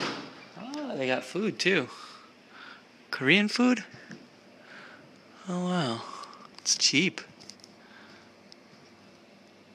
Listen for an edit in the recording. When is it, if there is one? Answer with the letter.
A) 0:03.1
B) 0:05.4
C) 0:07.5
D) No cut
A